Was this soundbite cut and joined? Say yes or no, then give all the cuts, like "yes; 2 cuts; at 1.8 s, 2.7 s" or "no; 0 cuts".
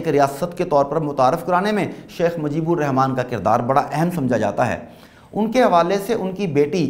no; 0 cuts